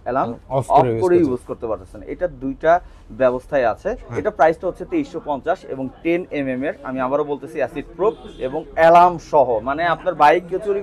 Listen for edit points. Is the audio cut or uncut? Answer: uncut